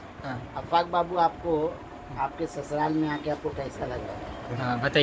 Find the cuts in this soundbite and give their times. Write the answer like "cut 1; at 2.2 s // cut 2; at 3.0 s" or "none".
none